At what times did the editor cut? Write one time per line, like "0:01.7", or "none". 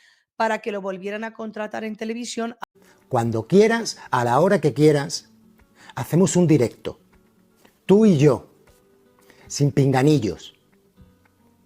0:02.6